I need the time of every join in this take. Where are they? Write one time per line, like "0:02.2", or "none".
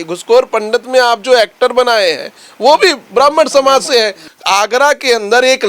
0:04.2